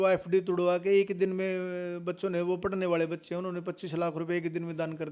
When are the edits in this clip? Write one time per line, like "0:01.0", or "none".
none